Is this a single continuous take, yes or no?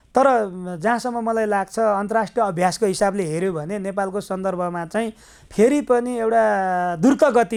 yes